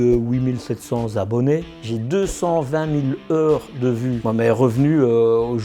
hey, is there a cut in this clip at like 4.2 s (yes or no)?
yes